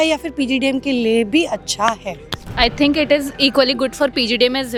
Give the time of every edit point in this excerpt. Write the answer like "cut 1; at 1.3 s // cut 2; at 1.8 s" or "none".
none